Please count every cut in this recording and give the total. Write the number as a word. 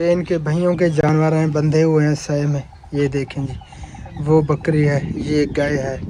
zero